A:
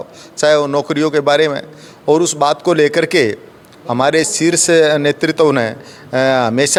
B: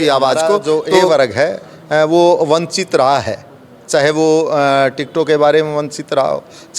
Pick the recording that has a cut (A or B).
B